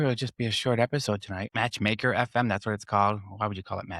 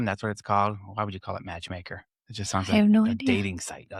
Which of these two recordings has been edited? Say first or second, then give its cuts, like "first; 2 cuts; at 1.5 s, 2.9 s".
first; 1 cut; at 1.5 s